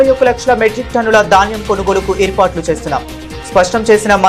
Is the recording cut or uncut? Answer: uncut